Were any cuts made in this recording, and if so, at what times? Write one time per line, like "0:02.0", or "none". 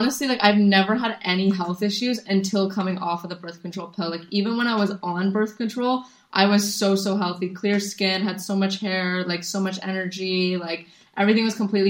none